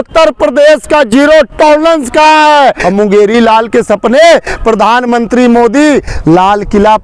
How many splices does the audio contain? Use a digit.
1